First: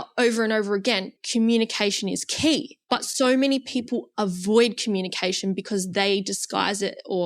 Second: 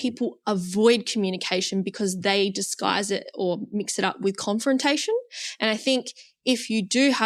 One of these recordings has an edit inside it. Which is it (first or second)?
first